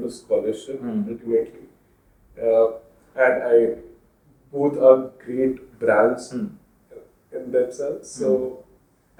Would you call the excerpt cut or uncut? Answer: uncut